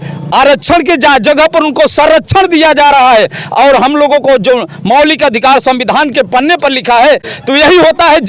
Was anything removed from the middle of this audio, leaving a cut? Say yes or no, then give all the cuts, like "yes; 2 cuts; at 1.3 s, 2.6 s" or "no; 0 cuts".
yes; 1 cut; at 7.3 s